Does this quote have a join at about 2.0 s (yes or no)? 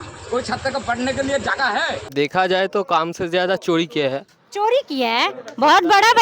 yes